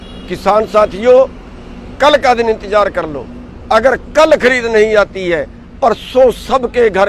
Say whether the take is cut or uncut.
uncut